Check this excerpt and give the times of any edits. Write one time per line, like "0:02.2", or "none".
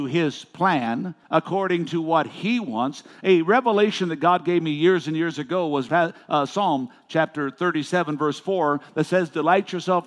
0:01.1
0:05.9